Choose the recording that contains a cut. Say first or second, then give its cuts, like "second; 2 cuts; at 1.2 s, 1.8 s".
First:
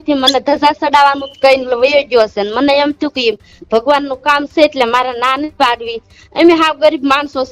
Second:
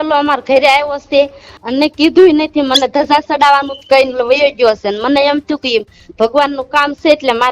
second; 1 cut; at 1.5 s